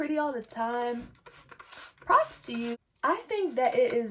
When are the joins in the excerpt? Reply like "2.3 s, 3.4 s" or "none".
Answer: 2.8 s